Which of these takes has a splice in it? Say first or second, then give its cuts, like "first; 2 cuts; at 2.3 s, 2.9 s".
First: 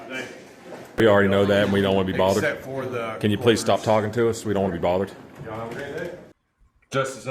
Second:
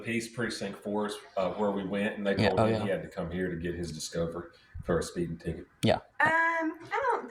first; 2 cuts; at 1.0 s, 6.3 s